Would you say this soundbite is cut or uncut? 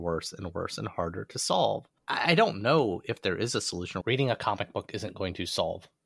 cut